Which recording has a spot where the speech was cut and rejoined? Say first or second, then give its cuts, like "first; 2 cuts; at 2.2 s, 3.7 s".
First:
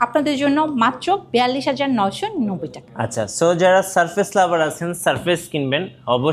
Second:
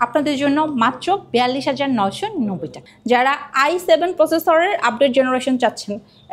second; 1 cut; at 2.8 s